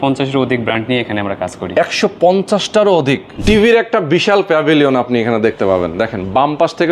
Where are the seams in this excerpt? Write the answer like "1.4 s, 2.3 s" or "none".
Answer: 3.4 s